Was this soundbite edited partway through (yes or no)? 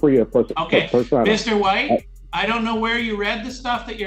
yes